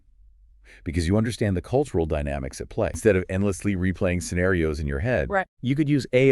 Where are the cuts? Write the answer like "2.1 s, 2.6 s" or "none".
3.0 s